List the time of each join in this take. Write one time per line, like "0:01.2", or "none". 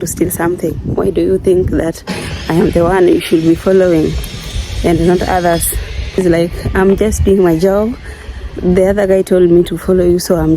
0:06.2